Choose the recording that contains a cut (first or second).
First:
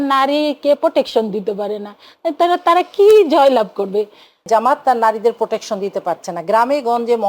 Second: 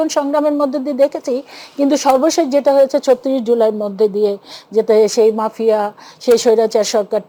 first